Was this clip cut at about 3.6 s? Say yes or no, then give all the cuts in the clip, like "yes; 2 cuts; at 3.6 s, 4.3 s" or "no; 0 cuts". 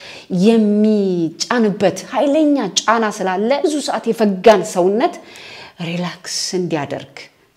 yes; 1 cut; at 3.6 s